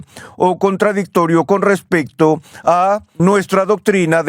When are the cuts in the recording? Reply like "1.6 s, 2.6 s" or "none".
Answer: 3.1 s